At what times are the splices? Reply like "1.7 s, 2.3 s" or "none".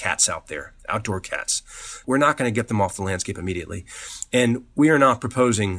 2.0 s